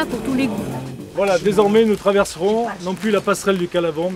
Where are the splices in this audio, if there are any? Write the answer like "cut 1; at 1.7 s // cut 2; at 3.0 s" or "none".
cut 1; at 1.0 s